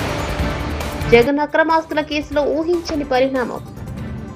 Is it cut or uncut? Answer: uncut